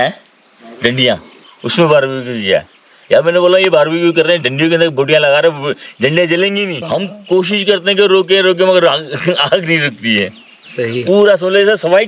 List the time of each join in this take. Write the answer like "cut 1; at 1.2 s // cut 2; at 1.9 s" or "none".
cut 1; at 6.8 s